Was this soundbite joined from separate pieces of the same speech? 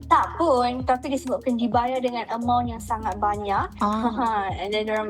no; 0 cuts

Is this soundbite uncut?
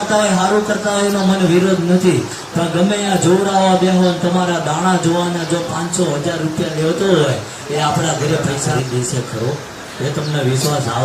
no; 1 cut; at 8.6 s

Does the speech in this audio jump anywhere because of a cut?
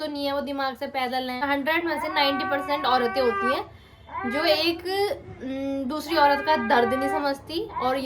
yes; 1 cut; at 1.4 s

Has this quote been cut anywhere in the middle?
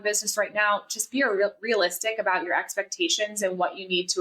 no; 0 cuts

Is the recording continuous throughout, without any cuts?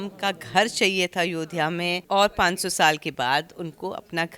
no; 1 cut; at 2.0 s

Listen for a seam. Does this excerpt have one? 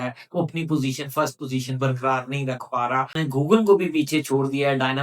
yes; 1 cut; at 3.2 s

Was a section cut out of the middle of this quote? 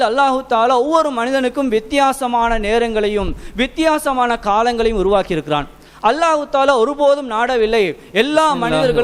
no; 0 cuts

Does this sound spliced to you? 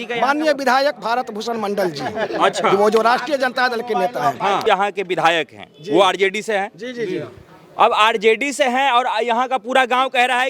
yes; 1 cut; at 4.7 s

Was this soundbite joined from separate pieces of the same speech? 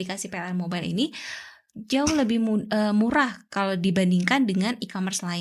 no; 0 cuts

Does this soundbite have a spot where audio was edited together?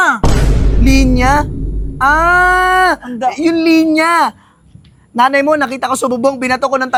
no; 0 cuts

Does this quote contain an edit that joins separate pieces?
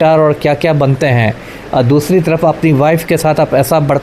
no; 0 cuts

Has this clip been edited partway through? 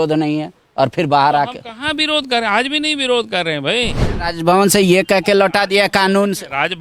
yes; 1 cut; at 4.1 s

